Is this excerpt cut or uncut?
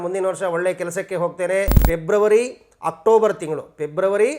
cut